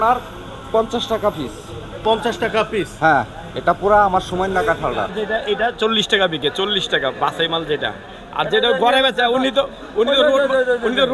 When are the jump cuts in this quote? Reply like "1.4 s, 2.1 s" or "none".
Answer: 5.1 s